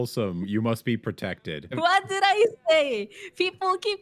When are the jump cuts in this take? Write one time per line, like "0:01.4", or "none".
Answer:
0:01.7